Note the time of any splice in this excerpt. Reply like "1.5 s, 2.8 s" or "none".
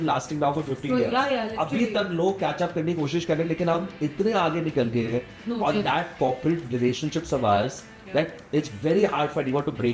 none